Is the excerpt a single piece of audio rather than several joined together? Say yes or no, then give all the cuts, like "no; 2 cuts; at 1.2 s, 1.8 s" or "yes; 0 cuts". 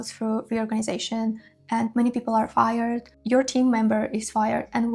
yes; 0 cuts